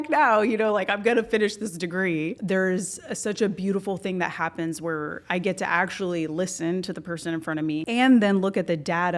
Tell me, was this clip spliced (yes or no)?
yes